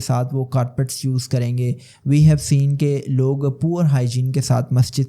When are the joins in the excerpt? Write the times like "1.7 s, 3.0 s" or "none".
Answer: none

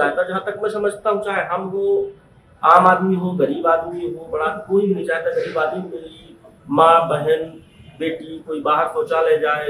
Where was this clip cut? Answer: none

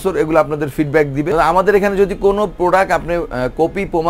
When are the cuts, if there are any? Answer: 1.3 s, 2.5 s

